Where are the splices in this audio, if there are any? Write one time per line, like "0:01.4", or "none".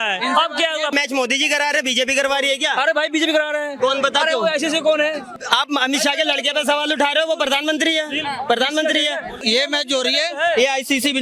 0:00.9
0:05.3
0:09.3